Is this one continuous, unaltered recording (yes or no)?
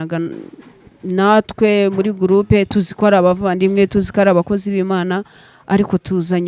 yes